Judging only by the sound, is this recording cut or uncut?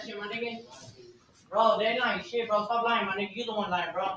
uncut